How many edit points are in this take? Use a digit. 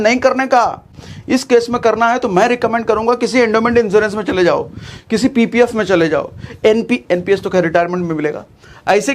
0